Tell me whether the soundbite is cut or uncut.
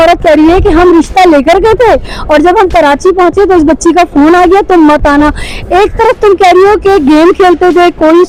uncut